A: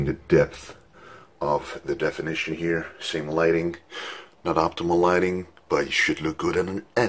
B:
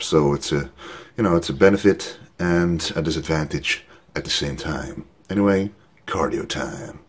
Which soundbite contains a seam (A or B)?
B